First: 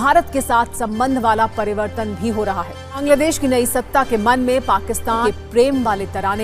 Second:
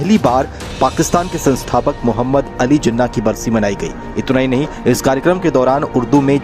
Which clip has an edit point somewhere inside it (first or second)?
first